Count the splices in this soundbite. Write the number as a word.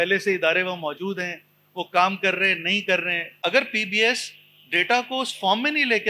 one